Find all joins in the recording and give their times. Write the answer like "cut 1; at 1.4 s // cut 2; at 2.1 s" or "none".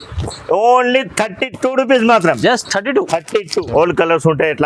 cut 1; at 3.7 s